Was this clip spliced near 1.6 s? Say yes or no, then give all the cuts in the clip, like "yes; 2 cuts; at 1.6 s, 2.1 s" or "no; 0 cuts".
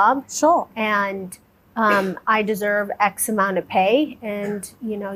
no; 0 cuts